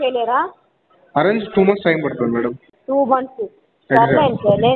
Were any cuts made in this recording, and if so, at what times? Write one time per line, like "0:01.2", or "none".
0:02.7